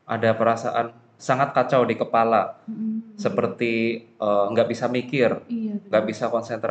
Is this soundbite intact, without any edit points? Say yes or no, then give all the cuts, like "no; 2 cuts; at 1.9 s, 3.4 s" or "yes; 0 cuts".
yes; 0 cuts